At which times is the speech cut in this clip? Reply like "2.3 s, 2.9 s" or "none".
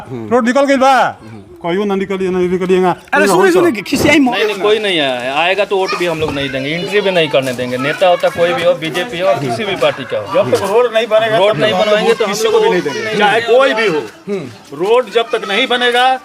4.3 s